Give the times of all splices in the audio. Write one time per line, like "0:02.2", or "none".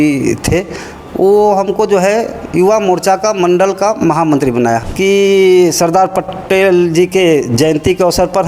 0:04.8